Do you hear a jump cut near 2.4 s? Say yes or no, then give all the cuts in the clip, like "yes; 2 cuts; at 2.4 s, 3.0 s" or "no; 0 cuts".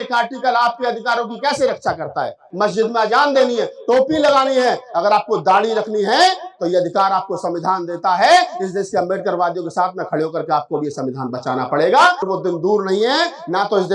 yes; 2 cuts; at 2.4 s, 12.2 s